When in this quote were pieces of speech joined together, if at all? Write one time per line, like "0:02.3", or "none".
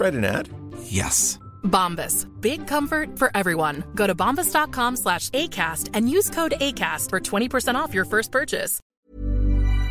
0:08.8